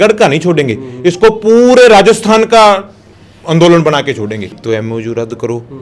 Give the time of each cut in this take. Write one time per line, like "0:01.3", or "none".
0:04.5